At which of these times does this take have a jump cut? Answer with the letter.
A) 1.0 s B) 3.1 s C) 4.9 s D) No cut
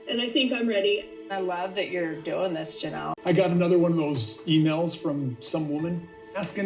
B